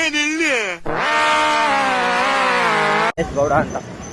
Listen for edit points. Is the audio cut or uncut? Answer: uncut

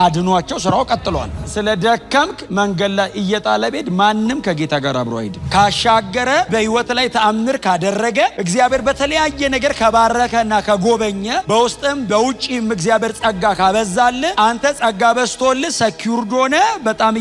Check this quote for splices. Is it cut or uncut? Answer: cut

